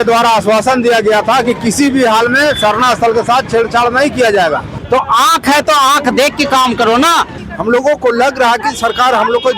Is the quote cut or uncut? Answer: cut